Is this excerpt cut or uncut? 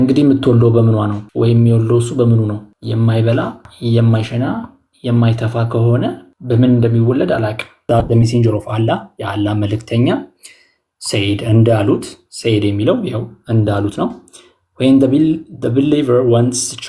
cut